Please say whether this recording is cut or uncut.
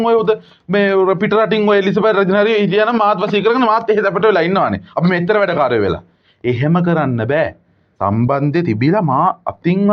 uncut